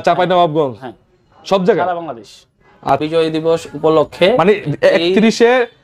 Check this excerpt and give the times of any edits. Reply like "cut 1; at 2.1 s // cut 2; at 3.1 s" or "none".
cut 1; at 2.9 s